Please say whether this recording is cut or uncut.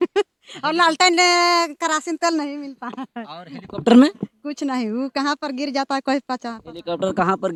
uncut